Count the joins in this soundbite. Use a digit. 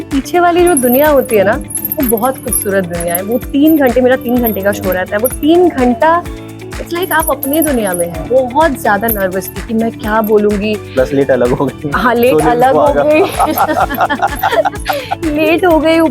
1